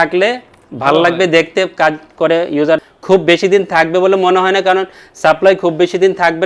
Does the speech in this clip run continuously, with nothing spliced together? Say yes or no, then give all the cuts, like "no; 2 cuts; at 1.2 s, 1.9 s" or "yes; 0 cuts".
no; 1 cut; at 2.8 s